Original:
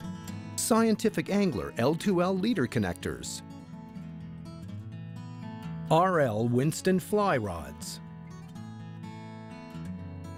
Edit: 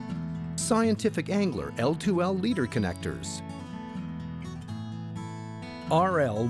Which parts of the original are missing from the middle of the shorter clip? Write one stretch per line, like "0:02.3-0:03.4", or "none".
none